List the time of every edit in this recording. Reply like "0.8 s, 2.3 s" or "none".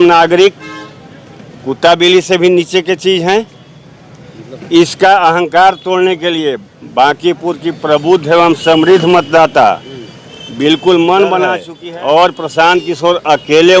11.7 s